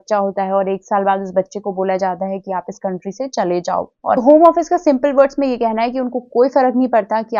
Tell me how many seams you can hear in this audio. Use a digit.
1